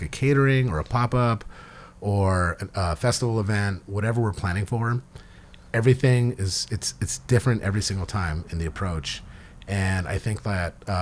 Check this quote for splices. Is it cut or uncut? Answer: uncut